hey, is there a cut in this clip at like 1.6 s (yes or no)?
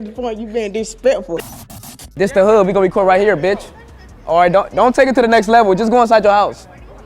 yes